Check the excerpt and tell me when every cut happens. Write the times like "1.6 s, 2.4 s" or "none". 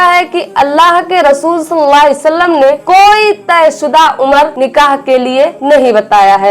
4.5 s, 5.6 s

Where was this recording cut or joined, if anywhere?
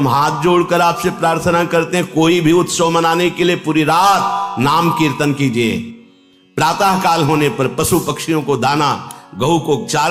none

